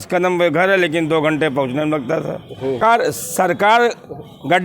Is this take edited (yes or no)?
yes